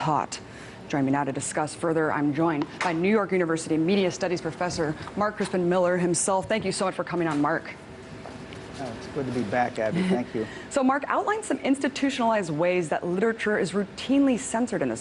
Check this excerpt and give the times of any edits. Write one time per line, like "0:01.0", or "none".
none